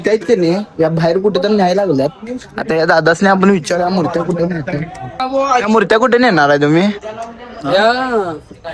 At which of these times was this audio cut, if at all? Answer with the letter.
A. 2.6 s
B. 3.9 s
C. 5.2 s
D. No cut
C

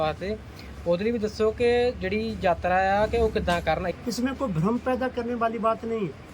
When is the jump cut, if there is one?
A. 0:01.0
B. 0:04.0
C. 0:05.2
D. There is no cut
B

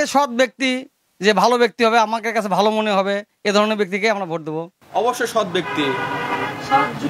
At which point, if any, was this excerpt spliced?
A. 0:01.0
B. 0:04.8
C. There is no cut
B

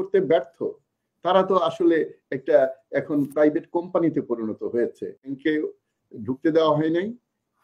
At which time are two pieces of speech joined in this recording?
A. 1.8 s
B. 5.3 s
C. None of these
B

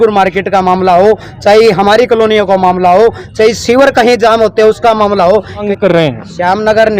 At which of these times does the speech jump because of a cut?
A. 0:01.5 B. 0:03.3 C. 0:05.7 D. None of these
C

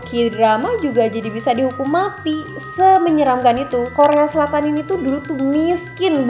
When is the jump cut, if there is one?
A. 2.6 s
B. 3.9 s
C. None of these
B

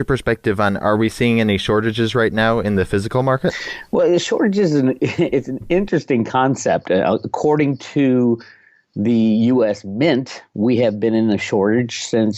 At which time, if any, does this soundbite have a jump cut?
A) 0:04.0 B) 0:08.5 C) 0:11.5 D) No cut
C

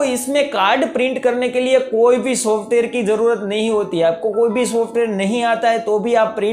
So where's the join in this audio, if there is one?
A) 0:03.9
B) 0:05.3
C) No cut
C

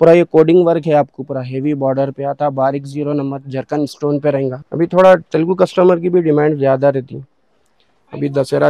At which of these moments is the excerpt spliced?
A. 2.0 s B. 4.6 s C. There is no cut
B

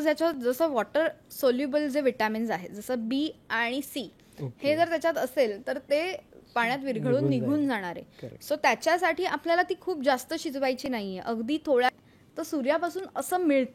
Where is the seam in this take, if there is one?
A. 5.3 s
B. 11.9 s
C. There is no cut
B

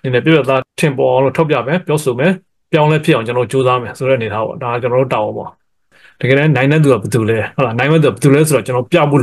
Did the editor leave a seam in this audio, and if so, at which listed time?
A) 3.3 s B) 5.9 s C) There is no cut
B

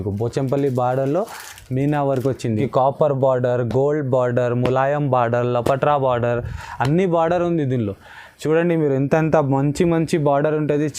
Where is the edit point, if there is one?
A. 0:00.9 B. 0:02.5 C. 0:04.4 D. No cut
B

